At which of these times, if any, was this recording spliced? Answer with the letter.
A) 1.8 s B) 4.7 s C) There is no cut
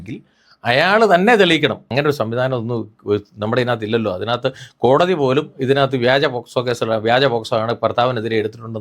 A